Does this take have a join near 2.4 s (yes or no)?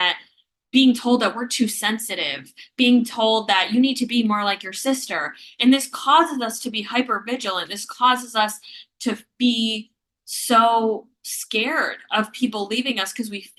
no